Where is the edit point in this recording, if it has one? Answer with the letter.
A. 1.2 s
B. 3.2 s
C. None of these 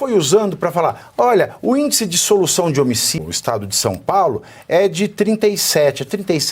B